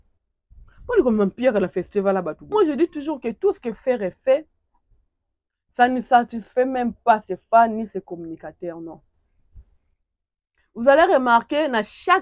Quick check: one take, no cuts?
no; 1 cut; at 2.5 s

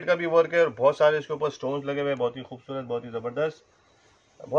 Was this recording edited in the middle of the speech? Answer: no; 0 cuts

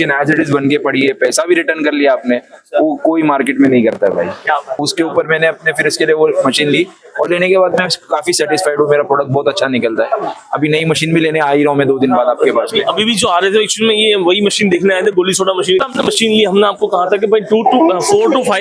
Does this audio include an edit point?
yes; 2 cuts; at 4.9 s, 15.8 s

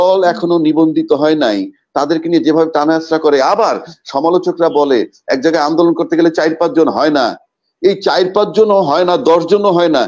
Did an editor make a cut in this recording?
no; 0 cuts

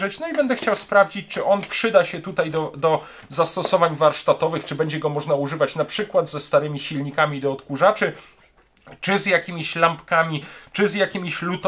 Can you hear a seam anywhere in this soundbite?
no; 0 cuts

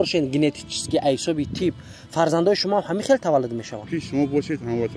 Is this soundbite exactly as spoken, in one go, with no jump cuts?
no; 1 cut; at 3.9 s

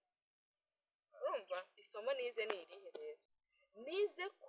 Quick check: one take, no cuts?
yes; 0 cuts

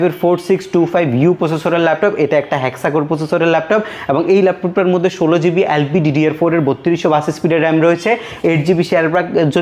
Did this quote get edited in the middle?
no; 0 cuts

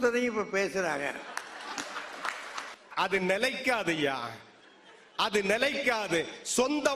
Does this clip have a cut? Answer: yes; 1 cut; at 2.7 s

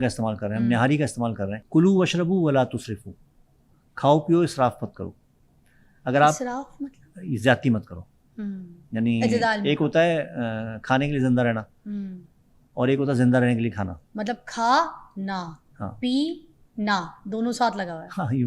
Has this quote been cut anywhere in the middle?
yes; 1 cut; at 1.5 s

